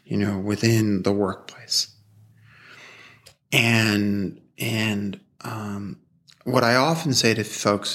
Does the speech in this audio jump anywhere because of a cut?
no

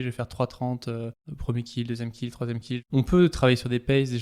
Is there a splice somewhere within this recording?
yes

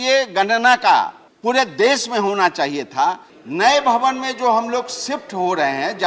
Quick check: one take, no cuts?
no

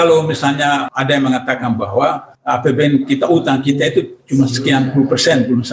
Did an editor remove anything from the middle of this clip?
yes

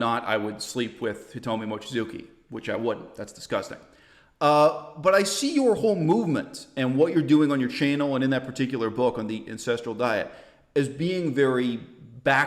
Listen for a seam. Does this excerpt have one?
no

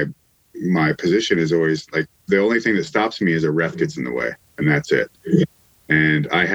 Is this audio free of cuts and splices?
yes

